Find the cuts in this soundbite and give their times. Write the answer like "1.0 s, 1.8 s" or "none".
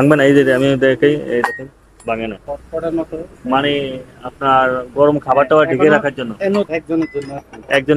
2.0 s, 6.7 s